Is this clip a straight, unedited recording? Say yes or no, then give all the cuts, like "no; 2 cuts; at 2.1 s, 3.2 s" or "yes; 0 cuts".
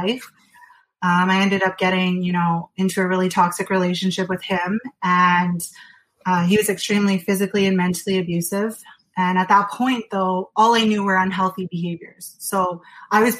yes; 0 cuts